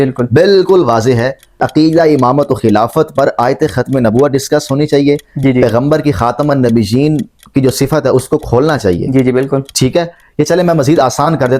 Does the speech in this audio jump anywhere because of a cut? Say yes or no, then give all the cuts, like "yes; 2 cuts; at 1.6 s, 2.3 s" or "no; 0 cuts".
yes; 1 cut; at 1.7 s